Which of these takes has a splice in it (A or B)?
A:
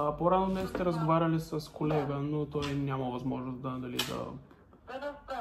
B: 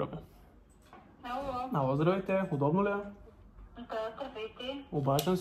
B